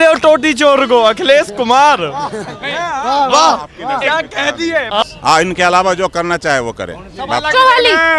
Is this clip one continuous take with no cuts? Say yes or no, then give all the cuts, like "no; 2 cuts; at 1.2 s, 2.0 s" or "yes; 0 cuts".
no; 1 cut; at 5.0 s